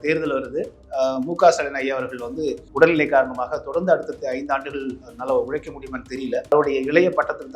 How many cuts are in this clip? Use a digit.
2